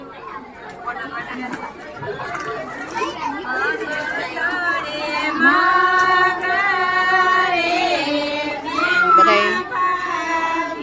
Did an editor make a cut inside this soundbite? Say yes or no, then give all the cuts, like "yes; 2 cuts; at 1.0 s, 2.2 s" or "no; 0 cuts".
no; 0 cuts